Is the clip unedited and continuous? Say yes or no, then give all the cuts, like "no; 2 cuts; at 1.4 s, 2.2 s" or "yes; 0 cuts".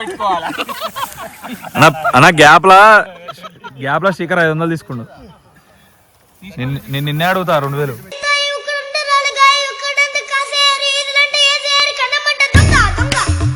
yes; 0 cuts